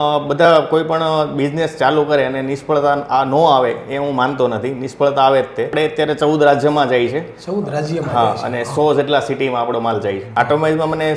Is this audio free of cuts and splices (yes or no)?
no